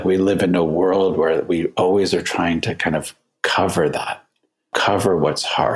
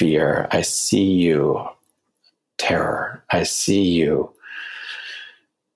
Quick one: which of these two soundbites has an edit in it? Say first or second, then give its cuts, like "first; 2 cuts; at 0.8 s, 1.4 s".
first; 1 cut; at 4.7 s